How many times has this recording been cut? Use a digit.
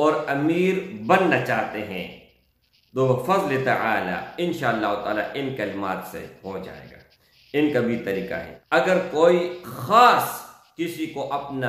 1